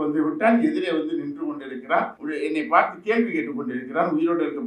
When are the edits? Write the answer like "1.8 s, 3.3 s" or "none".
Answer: 2.2 s